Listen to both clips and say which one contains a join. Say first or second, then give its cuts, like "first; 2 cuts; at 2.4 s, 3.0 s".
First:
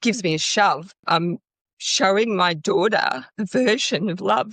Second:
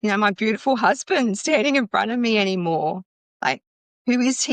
first; 1 cut; at 1.0 s